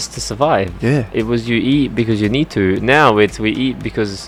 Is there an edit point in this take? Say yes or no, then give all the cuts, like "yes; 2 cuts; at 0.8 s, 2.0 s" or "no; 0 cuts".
no; 0 cuts